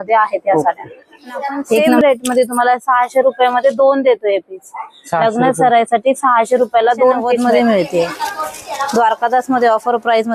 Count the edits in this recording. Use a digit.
2